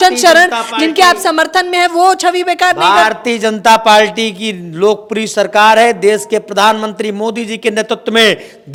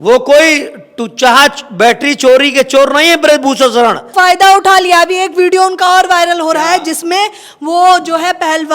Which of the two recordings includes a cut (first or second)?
second